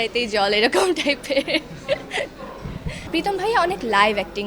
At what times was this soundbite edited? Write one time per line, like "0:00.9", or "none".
0:03.0